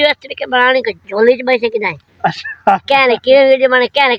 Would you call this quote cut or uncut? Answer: uncut